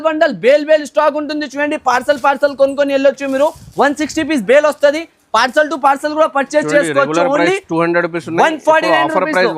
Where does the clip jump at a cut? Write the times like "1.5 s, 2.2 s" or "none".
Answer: none